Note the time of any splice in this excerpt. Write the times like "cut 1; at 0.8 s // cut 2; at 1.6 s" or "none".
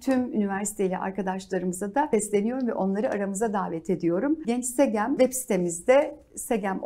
cut 1; at 2.1 s // cut 2; at 4.4 s // cut 3; at 5.2 s